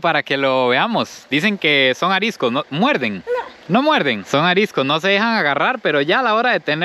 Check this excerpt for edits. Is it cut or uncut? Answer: uncut